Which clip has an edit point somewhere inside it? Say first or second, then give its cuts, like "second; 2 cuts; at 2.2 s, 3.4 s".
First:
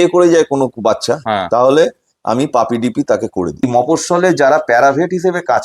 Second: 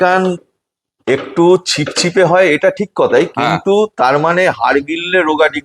first; 1 cut; at 3.6 s